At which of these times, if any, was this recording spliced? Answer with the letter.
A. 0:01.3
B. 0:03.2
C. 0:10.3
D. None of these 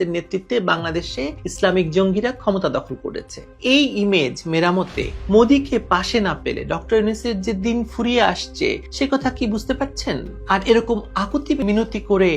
C